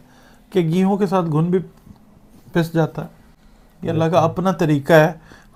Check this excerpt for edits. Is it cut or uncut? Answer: uncut